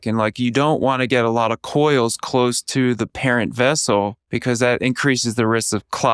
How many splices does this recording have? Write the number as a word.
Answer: one